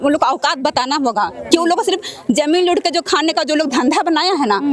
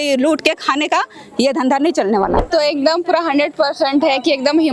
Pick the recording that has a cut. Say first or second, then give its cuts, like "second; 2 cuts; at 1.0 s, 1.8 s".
second; 1 cut; at 2.4 s